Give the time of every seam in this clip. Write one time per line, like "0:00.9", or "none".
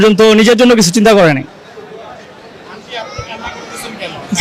none